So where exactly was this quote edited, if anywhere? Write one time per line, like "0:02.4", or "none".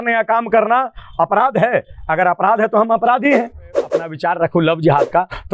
0:04.1